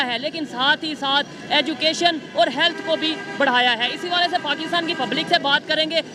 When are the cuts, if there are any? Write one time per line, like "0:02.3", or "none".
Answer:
none